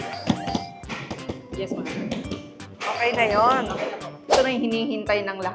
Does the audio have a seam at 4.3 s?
yes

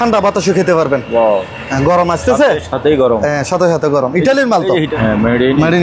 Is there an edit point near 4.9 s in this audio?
yes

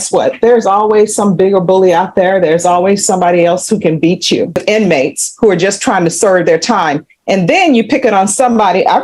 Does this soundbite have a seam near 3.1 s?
no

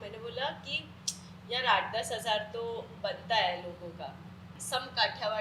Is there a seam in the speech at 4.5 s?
yes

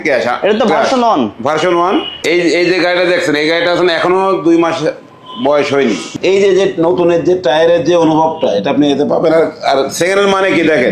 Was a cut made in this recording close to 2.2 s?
yes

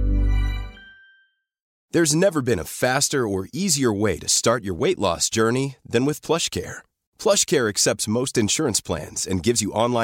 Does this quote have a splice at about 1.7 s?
yes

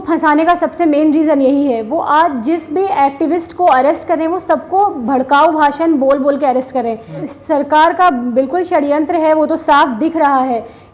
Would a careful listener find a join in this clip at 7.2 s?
yes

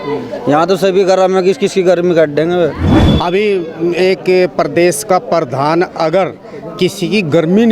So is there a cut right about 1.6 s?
no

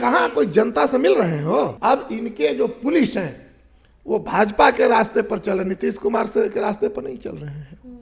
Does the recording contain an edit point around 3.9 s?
no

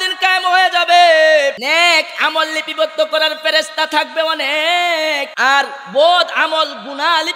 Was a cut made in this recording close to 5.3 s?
yes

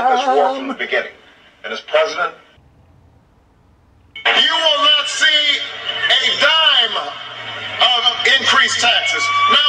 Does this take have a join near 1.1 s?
no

